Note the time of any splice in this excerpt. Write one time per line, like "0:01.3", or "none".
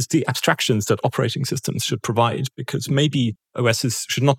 0:03.4